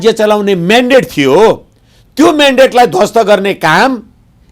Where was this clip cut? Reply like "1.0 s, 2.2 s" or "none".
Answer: none